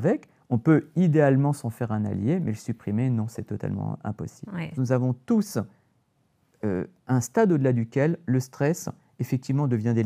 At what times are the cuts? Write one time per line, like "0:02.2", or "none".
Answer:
0:04.7